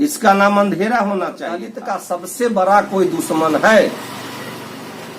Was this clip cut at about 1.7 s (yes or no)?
yes